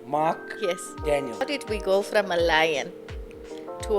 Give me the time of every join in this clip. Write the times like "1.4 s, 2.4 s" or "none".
1.4 s